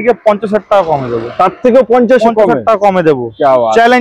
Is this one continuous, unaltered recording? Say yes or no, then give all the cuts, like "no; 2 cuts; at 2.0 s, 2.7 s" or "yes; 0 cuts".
yes; 0 cuts